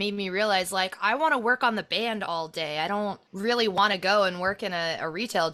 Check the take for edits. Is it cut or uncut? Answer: uncut